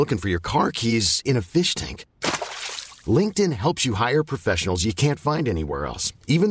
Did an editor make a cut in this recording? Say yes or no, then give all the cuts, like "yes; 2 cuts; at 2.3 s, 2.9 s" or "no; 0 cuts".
no; 0 cuts